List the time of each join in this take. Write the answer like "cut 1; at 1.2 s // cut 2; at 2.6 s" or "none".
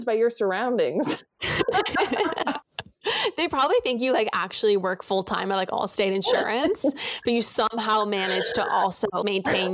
none